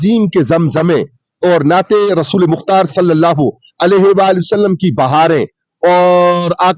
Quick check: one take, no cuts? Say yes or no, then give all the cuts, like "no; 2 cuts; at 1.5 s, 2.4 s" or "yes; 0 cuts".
yes; 0 cuts